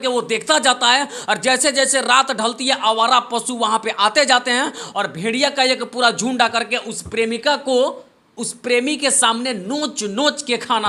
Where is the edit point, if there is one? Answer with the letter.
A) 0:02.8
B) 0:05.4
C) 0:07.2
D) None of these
D